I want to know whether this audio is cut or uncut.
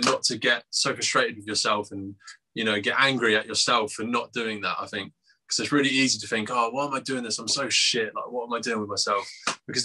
uncut